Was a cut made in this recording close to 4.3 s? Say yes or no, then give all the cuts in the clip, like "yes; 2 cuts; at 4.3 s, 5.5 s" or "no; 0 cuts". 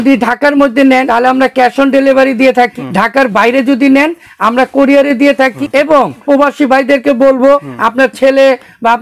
no; 4 cuts; at 1.1 s, 2.7 s, 6.1 s, 7.7 s